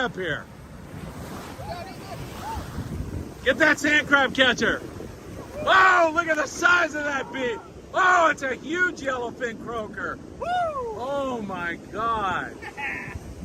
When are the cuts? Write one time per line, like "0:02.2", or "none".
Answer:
none